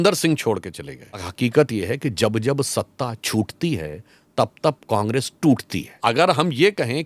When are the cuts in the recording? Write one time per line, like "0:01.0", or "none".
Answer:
0:01.3
0:06.0